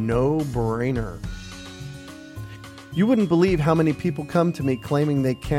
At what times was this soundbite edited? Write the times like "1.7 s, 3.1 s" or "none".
1.1 s, 2.9 s